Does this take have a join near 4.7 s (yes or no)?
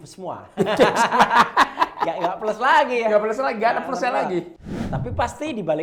yes